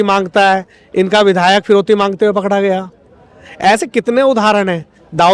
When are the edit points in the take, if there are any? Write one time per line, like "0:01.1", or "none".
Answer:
none